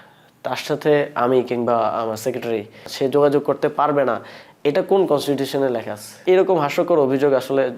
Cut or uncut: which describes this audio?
cut